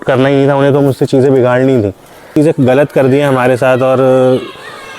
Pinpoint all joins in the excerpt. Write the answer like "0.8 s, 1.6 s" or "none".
2.3 s

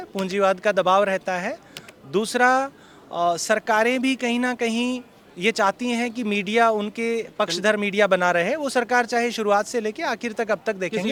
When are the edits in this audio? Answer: none

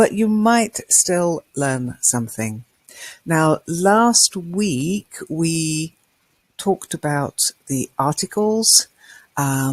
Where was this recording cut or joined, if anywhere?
1.3 s

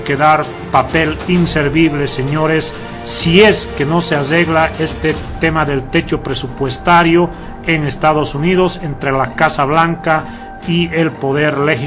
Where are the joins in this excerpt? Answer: none

